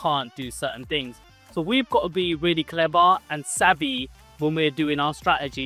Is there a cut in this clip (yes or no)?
no